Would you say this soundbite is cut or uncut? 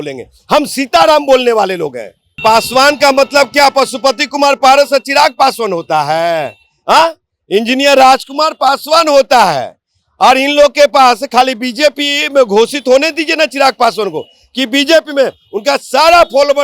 cut